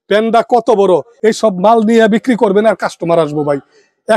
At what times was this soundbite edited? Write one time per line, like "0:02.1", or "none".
0:01.1